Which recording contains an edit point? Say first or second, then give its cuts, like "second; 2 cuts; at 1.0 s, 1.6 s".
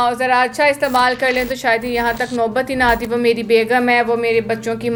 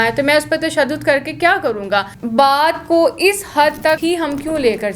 second; 2 cuts; at 2.2 s, 4.0 s